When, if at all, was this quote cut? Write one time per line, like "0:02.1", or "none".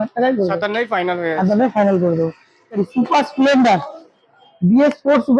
0:02.8